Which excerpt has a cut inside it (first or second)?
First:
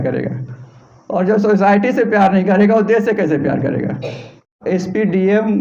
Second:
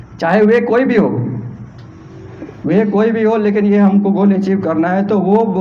first